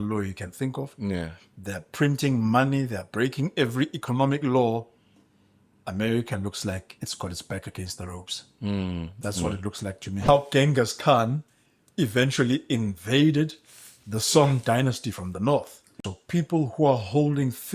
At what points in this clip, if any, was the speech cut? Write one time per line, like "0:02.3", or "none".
0:10.3
0:15.8